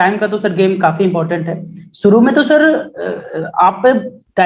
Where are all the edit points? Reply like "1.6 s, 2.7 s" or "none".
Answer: none